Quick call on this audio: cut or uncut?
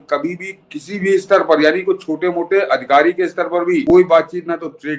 cut